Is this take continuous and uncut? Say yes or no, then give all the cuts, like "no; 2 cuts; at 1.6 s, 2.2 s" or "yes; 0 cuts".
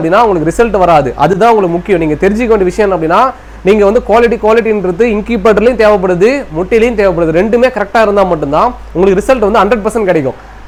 yes; 0 cuts